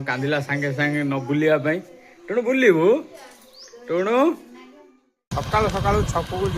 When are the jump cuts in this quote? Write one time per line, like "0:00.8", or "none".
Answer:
0:05.1